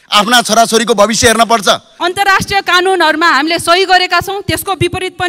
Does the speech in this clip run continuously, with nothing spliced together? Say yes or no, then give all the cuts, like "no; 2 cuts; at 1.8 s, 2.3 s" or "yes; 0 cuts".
no; 1 cut; at 1.9 s